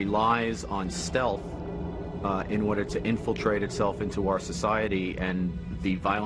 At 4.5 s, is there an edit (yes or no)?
yes